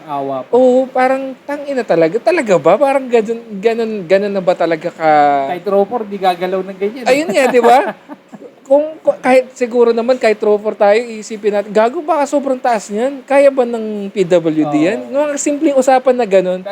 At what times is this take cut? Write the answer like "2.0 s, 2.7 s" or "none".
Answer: none